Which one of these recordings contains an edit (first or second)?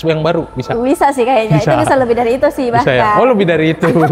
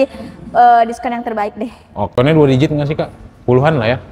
second